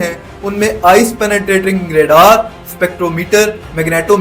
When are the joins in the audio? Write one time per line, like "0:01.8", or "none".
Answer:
none